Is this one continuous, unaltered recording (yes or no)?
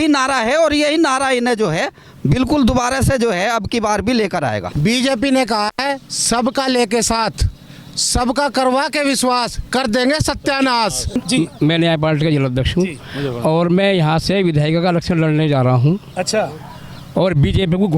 no